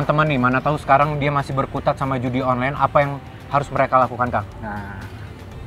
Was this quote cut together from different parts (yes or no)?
no